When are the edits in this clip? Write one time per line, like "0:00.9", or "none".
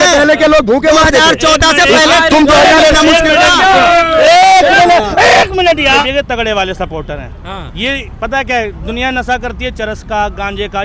0:06.0